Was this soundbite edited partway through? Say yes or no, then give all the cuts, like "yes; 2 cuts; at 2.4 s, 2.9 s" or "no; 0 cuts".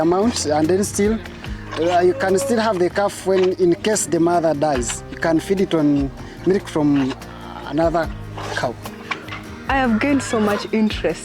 yes; 1 cut; at 9.3 s